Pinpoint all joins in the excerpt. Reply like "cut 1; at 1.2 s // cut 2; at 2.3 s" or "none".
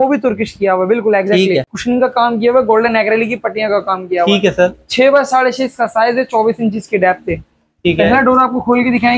cut 1; at 1.7 s